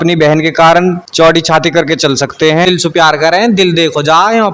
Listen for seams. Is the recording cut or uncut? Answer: cut